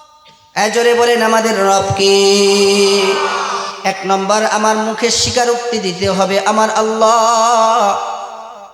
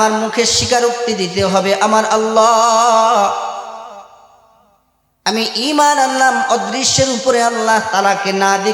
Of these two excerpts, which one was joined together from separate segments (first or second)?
first